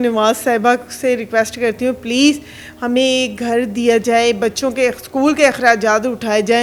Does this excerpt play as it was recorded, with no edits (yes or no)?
yes